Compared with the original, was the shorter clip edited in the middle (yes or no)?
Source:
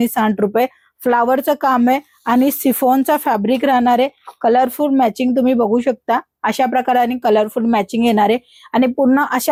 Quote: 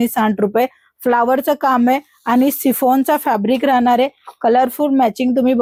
no